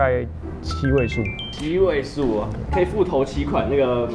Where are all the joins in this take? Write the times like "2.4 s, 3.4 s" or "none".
none